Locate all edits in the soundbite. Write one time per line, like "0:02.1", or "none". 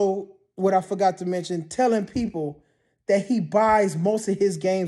none